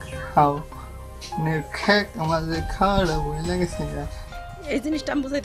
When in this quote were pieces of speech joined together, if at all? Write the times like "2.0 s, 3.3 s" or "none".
4.2 s

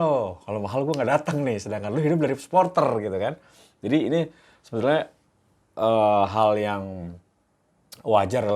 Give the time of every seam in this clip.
none

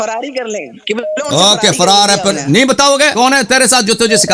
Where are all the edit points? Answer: 3.1 s

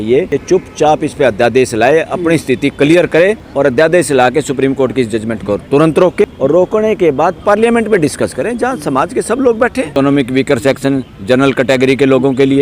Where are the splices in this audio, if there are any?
9.9 s

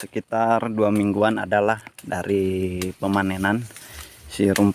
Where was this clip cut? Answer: none

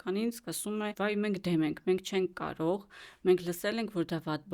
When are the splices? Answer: 0.9 s

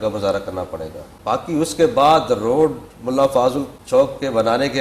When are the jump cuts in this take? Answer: 1.1 s, 3.7 s

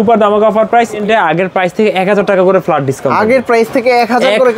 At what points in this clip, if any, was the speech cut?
1.0 s

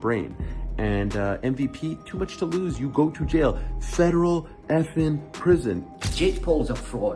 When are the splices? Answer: 5.8 s

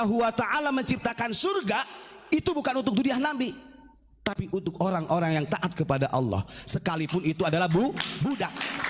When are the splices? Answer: none

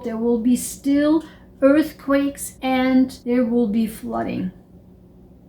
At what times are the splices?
2.5 s, 3.2 s

